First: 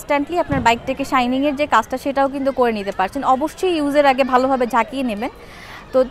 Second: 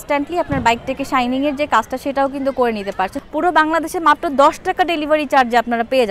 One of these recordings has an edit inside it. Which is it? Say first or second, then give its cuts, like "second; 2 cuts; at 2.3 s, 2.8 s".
second; 1 cut; at 3.2 s